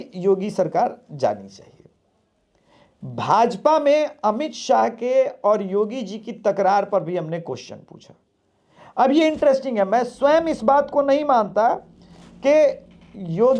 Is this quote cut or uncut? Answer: uncut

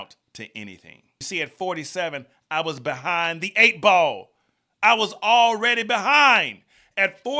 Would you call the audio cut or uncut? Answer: cut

